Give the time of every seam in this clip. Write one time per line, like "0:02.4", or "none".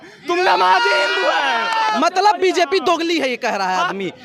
0:01.9